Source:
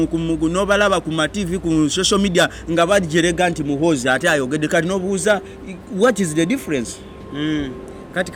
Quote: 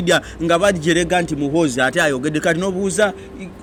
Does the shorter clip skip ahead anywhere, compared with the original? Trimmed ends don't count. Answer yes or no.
no